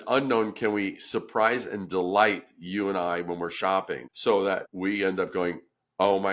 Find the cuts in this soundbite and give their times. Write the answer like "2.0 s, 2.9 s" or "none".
4.0 s, 4.7 s